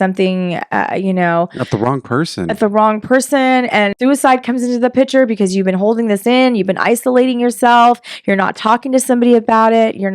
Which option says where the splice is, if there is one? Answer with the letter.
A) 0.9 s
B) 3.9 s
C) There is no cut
B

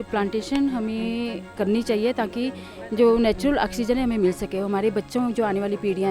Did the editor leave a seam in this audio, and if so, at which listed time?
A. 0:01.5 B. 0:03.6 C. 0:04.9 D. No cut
A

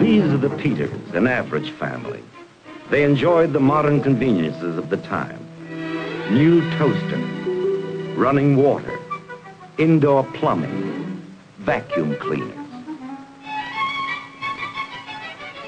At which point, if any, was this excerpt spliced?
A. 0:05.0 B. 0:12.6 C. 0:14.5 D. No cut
B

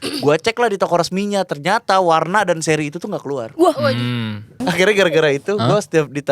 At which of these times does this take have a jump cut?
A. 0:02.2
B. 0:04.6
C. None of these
B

